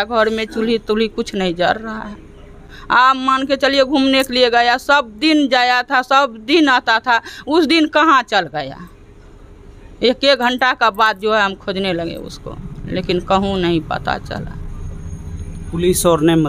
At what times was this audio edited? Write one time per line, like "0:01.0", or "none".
none